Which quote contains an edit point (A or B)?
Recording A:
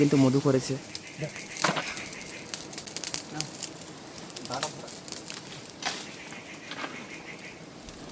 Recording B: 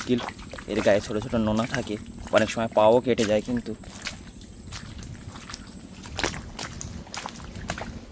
A